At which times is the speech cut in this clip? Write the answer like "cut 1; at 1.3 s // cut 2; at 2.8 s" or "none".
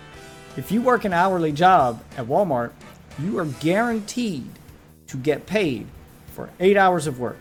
none